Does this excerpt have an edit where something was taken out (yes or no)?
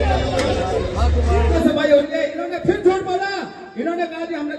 yes